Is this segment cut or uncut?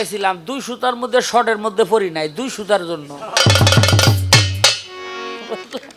uncut